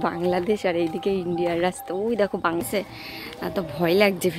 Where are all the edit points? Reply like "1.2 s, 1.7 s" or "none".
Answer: 2.4 s